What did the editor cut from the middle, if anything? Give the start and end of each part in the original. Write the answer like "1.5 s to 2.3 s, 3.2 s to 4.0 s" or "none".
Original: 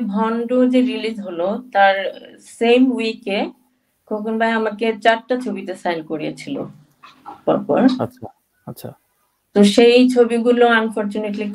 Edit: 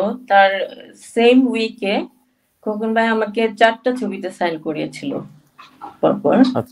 none

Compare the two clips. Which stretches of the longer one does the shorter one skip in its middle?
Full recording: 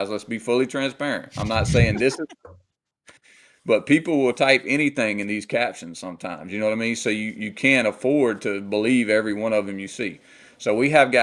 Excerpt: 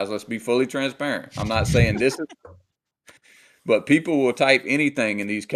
none

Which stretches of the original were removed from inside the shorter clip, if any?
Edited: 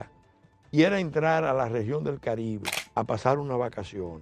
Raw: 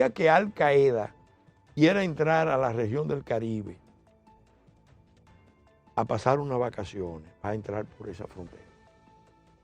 3.8 s to 5.8 s

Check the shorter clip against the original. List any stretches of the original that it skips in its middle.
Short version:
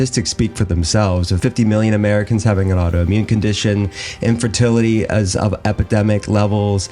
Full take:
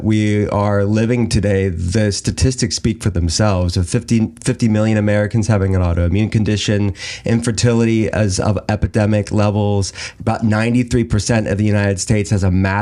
3.8 s to 4.4 s

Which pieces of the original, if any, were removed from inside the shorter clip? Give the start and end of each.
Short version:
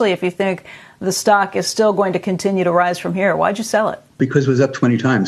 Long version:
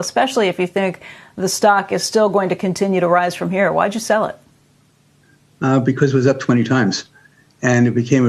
4.5 s to 5.8 s

